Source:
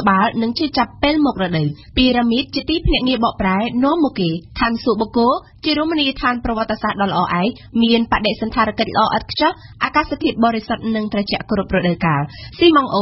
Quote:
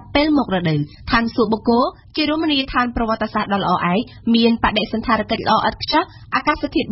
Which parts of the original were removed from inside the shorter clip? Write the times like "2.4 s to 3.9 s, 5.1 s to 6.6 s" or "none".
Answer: 1.8 s to 4.4 s